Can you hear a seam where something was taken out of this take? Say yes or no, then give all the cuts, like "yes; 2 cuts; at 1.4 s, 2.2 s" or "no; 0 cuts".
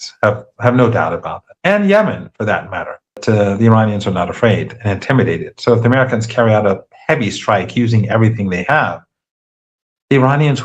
yes; 1 cut; at 3.2 s